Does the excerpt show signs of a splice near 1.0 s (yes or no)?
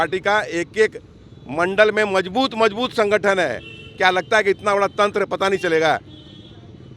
no